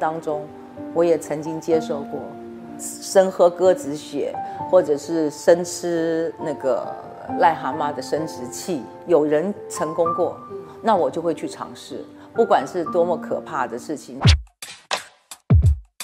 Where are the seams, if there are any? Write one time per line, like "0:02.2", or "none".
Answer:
0:02.9
0:09.0
0:14.1